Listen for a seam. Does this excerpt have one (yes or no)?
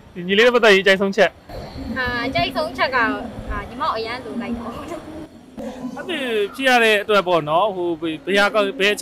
yes